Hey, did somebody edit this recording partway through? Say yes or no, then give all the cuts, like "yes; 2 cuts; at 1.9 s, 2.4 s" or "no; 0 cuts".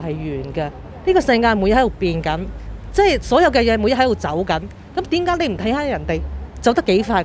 no; 0 cuts